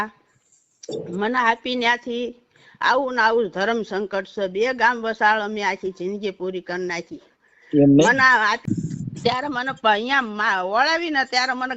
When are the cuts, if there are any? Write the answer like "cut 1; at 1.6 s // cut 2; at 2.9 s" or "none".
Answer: cut 1; at 8.7 s